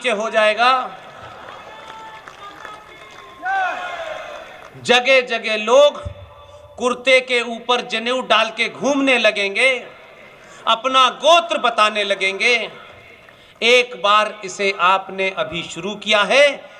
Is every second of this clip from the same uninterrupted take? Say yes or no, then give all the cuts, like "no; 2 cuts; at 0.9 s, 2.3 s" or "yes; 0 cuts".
yes; 0 cuts